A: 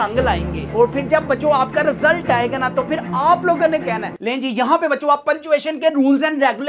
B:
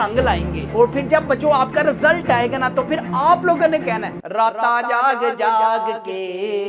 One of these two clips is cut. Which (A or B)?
A